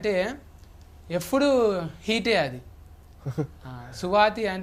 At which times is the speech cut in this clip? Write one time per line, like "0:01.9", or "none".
none